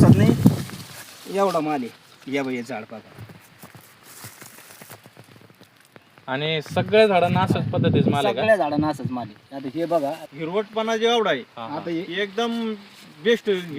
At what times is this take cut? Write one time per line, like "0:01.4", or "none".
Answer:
0:10.2